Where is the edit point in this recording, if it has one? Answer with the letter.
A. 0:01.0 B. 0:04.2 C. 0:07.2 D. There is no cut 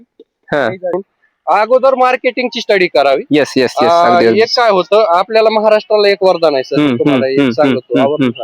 A